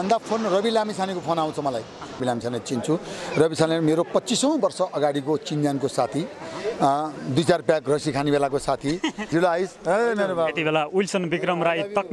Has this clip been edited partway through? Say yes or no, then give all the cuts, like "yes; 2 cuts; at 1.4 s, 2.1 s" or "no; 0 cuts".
yes; 2 cuts; at 2.2 s, 9.2 s